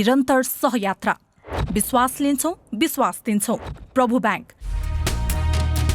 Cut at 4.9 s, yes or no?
yes